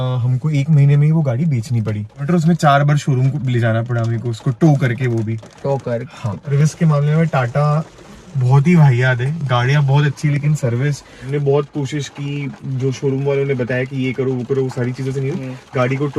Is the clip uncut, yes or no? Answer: no